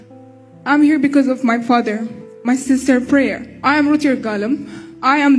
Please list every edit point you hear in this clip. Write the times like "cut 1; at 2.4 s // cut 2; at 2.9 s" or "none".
cut 1; at 3.5 s